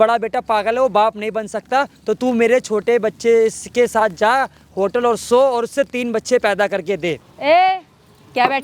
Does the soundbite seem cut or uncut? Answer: cut